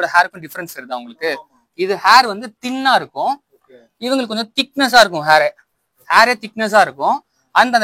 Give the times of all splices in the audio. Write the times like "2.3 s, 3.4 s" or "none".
none